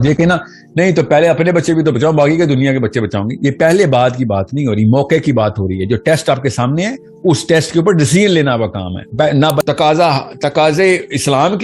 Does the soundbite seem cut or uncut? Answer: cut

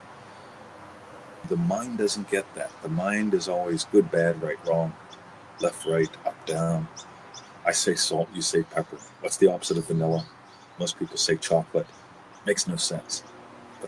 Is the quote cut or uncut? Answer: cut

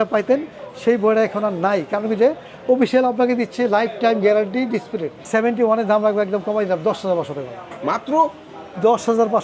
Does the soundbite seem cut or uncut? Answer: cut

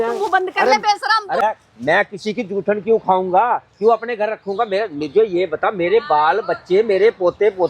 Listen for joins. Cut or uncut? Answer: cut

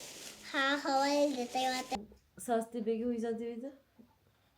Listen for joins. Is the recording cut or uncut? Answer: cut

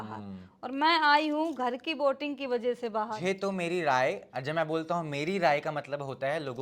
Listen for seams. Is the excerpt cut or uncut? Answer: cut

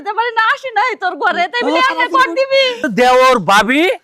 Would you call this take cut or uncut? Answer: cut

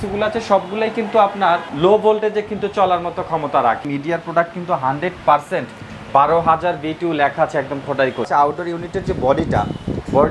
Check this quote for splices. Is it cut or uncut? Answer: cut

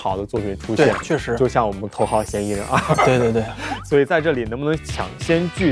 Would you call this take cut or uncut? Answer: cut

